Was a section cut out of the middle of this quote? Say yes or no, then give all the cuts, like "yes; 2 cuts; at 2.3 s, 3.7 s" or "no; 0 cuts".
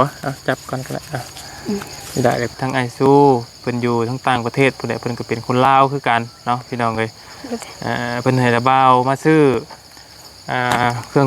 yes; 1 cut; at 2.5 s